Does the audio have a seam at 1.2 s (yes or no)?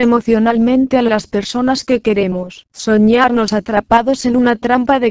no